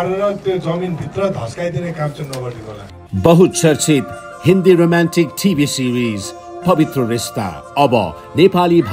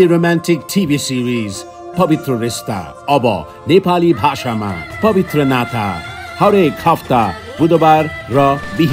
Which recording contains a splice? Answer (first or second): first